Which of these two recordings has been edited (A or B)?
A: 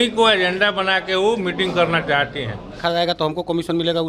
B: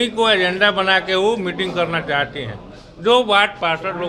A